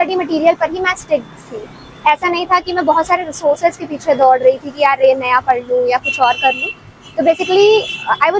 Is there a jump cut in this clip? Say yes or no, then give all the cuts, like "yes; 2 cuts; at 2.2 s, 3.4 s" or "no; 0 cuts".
no; 0 cuts